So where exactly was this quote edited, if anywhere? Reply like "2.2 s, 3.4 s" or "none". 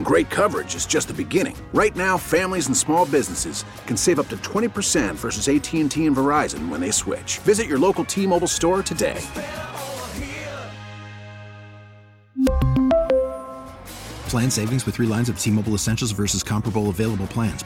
none

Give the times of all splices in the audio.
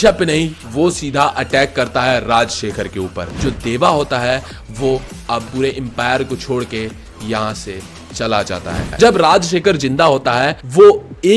3.2 s, 8.8 s

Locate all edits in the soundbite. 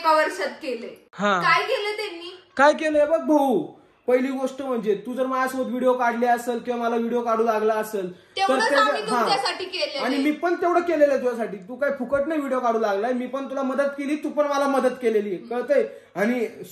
none

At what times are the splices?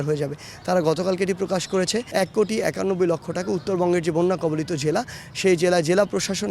2.1 s

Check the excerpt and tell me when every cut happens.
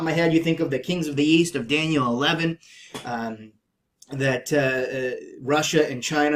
none

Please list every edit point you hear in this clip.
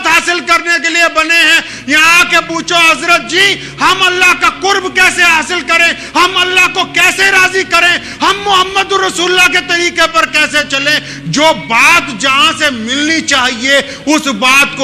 none

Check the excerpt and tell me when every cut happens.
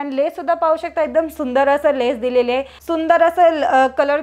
2.7 s

